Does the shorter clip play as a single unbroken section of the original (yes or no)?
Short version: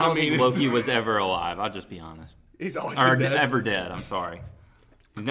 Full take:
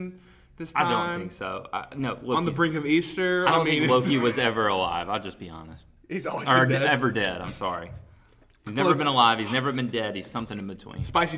yes